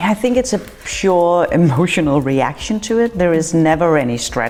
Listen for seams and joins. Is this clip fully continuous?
yes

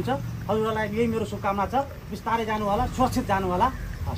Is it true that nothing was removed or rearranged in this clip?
yes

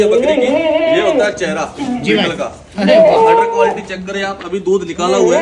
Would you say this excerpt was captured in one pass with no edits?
yes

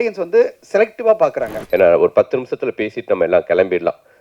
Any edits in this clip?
yes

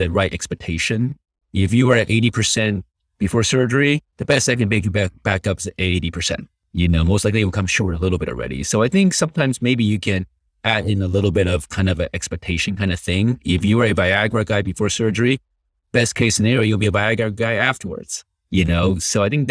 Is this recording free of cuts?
no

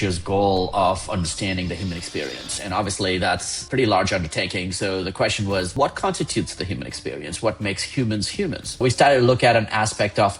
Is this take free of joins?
no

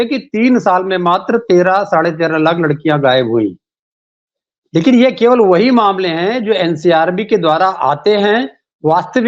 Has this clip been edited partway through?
no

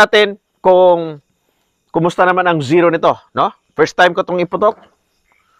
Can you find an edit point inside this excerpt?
no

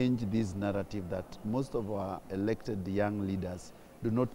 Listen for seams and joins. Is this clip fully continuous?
yes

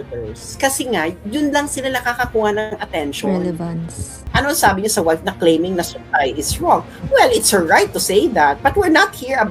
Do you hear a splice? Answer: yes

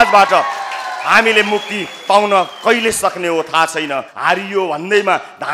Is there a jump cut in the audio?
yes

